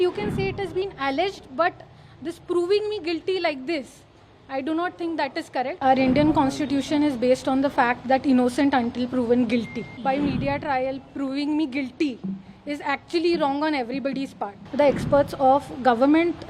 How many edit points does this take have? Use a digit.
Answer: 3